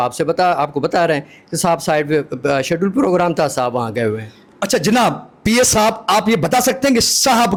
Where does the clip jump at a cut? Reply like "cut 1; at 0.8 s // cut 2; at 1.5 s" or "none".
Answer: none